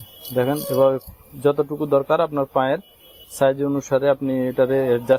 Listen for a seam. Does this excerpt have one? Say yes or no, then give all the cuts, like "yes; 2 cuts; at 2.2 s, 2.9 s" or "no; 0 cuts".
no; 0 cuts